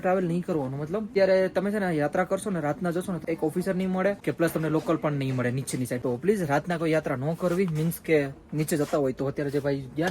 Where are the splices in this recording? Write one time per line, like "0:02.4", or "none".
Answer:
0:01.1
0:03.2
0:04.2
0:05.9